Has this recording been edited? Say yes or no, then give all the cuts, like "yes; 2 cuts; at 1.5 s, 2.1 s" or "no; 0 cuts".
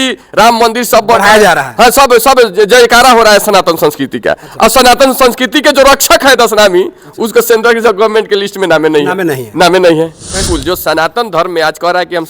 yes; 1 cut; at 10.5 s